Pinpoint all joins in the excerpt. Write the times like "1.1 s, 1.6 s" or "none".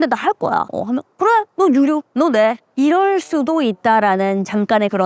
none